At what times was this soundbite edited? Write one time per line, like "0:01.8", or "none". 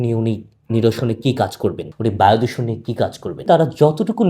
0:01.9
0:03.4